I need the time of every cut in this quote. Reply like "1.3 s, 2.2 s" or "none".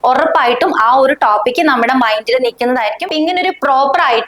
3.1 s